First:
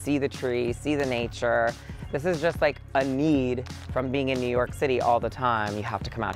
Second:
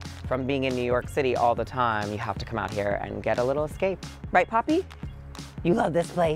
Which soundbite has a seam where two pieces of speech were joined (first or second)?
second